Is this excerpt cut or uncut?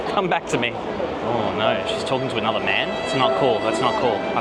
uncut